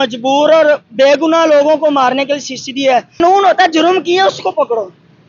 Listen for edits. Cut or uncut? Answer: cut